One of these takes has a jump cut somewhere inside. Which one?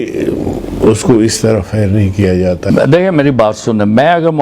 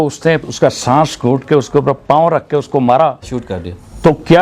first; 1 cut; at 2.6 s

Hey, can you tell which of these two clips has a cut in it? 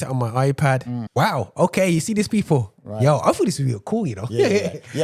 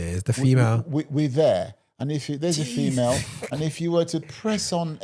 first; 1 cut; at 1.1 s

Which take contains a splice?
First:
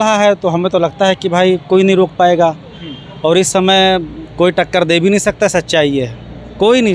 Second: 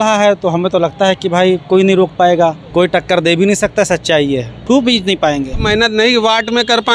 second; 3 cuts; at 2.6 s, 4.5 s, 5.6 s

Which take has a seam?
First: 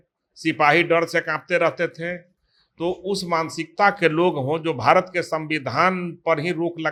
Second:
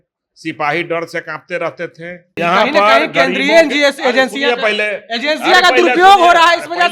second; 1 cut; at 2.2 s

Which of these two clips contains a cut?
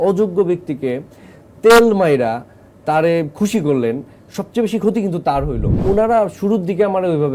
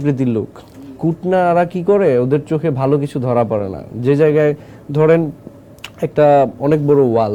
first; 1 cut; at 5.7 s

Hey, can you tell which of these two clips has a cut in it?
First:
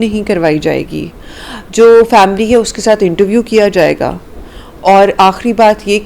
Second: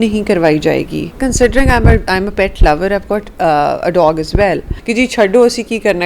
second; 2 cuts; at 1.2 s, 4.7 s

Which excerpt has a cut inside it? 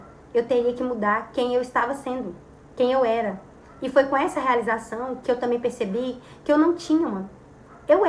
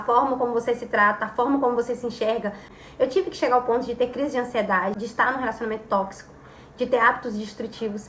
second; 1 cut; at 5.0 s

